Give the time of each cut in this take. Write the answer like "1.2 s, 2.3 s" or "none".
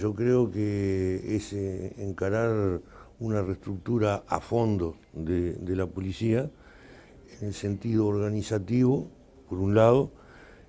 none